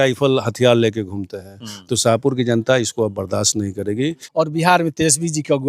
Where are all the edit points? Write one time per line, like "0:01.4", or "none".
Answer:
0:04.2